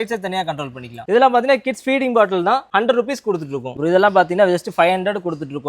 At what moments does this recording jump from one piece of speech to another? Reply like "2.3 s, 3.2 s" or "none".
1.0 s, 2.7 s, 3.8 s